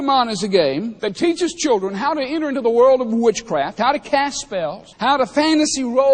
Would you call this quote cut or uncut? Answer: cut